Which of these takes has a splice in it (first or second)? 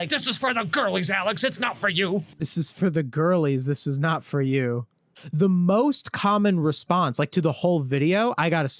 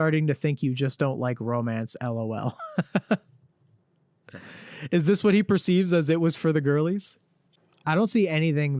first